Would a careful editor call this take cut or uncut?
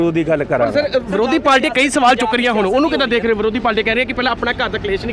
uncut